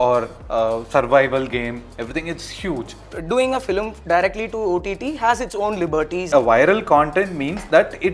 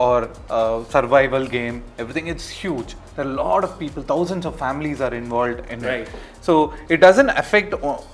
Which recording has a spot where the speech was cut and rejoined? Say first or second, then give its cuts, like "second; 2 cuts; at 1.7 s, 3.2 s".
first; 2 cuts; at 3.1 s, 6.2 s